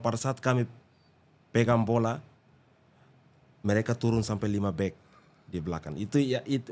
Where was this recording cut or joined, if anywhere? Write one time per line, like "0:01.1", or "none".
none